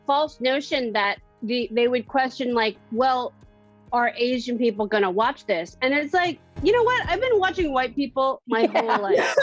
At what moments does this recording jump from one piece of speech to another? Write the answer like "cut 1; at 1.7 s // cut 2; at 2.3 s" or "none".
none